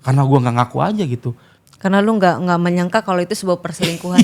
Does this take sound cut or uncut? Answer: uncut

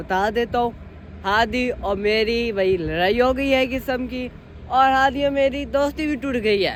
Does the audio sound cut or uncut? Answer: uncut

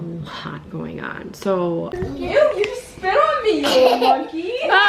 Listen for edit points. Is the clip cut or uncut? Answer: cut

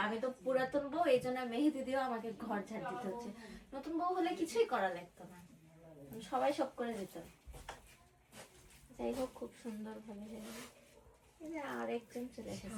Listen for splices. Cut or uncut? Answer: uncut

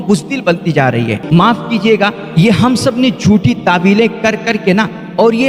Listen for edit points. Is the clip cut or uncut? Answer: cut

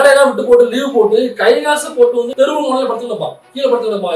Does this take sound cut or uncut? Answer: cut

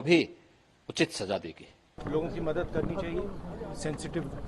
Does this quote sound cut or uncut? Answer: cut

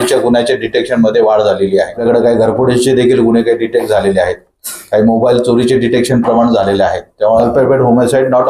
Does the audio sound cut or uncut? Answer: cut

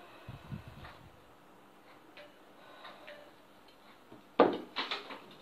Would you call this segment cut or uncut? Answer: uncut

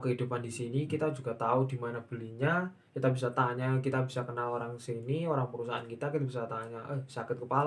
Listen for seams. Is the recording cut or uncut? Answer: uncut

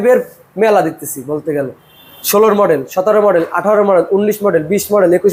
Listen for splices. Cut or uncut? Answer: uncut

